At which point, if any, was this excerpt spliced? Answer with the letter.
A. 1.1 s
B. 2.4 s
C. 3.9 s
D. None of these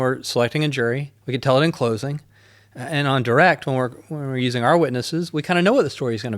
A